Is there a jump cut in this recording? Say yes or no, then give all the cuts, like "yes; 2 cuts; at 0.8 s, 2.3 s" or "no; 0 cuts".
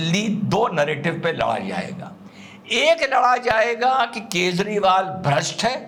no; 0 cuts